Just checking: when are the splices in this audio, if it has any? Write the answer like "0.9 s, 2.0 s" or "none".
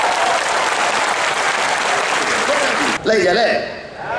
3.0 s